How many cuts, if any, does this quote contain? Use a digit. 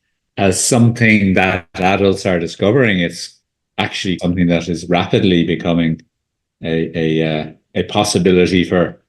1